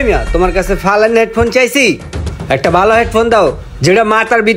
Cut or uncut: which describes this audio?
uncut